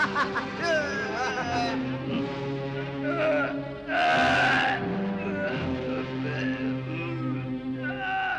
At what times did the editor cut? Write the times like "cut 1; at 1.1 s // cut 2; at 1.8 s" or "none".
cut 1; at 1.7 s